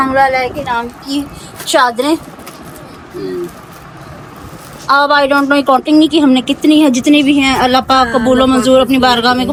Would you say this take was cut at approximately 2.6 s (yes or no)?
no